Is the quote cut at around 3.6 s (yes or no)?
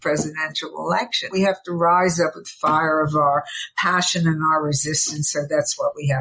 no